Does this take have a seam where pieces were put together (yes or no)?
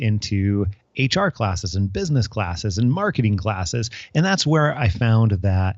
no